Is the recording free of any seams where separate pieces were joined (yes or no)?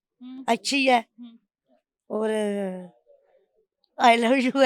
yes